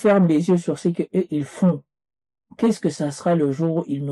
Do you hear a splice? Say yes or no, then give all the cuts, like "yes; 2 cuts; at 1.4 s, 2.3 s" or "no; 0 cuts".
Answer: no; 0 cuts